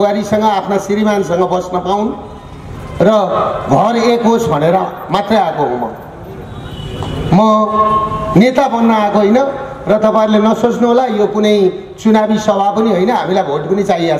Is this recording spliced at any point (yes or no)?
no